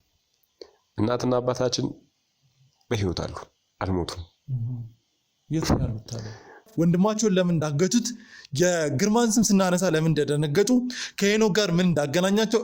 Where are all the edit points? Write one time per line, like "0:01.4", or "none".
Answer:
0:06.7